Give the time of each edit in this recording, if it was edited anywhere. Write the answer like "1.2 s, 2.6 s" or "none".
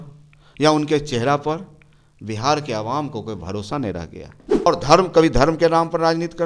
4.7 s